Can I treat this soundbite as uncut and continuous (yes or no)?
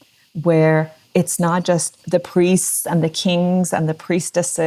no